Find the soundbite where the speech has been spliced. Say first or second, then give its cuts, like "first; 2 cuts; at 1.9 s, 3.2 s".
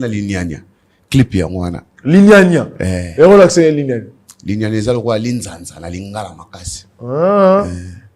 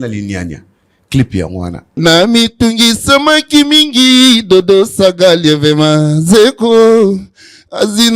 second; 1 cut; at 1.9 s